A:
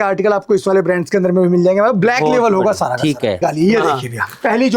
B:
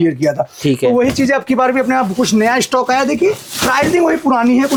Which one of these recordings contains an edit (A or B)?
A